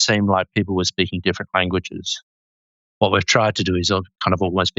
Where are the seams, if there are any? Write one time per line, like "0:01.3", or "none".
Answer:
0:02.6